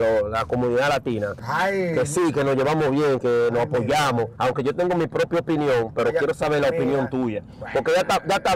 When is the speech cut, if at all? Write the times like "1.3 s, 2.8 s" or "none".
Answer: none